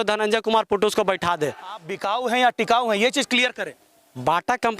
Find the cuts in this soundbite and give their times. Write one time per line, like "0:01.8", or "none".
0:01.9